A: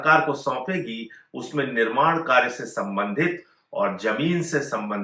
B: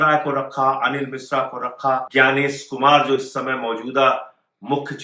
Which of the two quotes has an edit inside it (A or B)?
B